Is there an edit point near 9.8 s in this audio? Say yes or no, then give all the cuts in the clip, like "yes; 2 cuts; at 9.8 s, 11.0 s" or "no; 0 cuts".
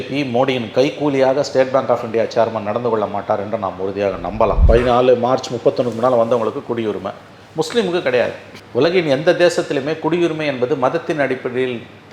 no; 1 cut; at 4.6 s